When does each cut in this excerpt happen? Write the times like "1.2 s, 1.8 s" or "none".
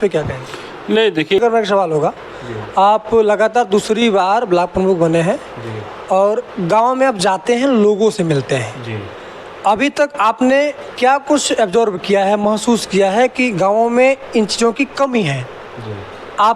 1.4 s